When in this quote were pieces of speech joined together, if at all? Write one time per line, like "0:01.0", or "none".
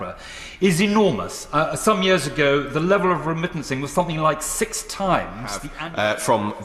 0:05.7